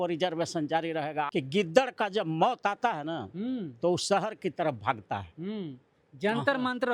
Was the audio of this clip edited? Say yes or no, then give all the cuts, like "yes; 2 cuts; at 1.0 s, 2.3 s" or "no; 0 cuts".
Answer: yes; 1 cut; at 1.3 s